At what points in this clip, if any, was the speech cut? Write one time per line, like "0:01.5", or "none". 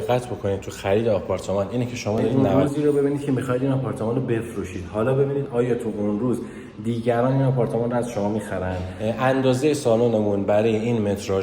0:02.3
0:08.9